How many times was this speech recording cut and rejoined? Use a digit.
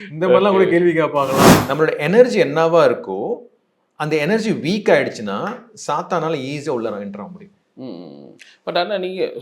1